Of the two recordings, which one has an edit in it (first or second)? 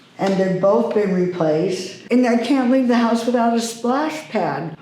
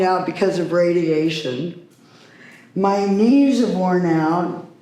first